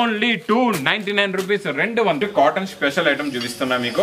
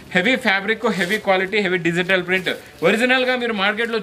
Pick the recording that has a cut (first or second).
first